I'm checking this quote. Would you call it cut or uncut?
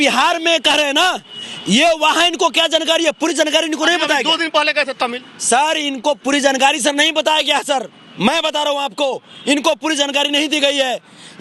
uncut